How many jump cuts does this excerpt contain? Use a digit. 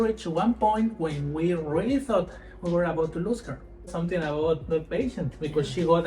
1